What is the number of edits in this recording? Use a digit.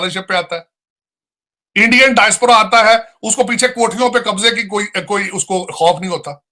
0